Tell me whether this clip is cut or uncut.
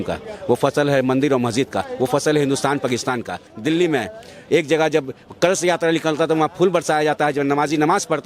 cut